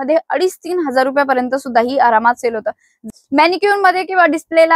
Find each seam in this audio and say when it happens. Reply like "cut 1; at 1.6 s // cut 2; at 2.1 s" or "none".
cut 1; at 3.0 s